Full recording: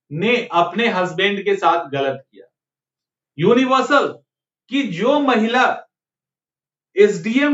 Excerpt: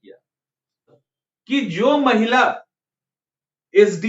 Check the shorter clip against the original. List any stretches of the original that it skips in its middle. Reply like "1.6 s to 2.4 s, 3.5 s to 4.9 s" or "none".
3.3 s to 4.2 s